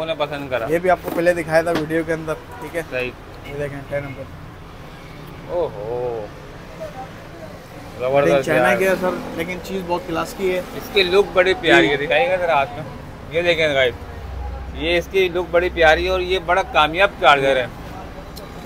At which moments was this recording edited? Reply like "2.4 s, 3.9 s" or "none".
none